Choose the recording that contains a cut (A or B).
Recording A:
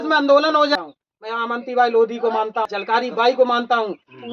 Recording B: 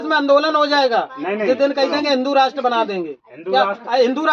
A